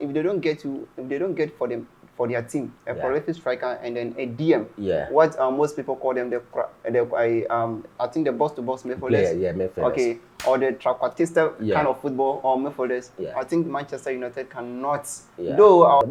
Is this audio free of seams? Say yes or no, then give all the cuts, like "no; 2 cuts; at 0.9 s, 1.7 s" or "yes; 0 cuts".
yes; 0 cuts